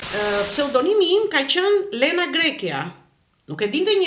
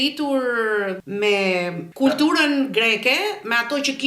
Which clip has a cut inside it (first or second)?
second